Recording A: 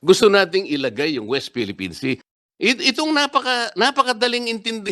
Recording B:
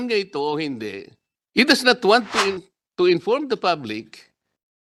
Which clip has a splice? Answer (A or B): A